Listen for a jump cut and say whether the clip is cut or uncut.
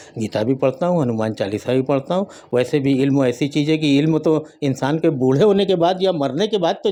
uncut